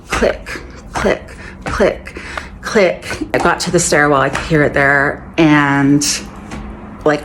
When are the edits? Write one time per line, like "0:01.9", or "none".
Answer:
0:03.3